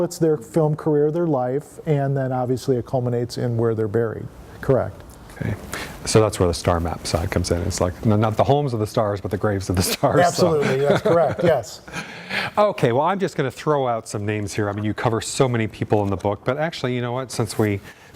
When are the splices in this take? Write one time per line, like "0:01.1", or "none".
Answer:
none